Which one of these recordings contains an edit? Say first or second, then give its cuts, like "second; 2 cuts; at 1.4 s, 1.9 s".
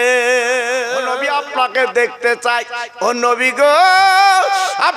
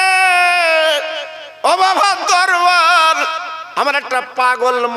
first; 1 cut; at 1.1 s